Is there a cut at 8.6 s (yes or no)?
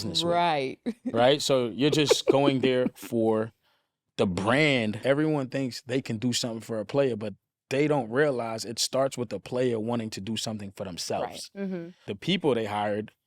no